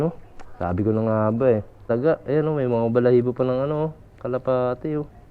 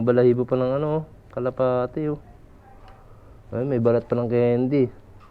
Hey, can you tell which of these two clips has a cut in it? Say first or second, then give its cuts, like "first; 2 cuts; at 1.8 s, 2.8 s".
first; 1 cut; at 1.8 s